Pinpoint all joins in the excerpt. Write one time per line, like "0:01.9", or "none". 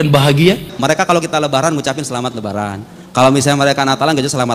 0:01.0